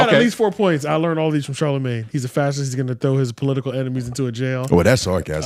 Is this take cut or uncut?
uncut